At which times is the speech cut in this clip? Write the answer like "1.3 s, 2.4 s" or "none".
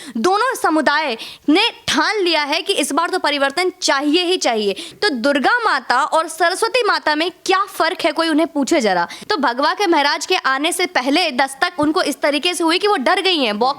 4.9 s, 9.2 s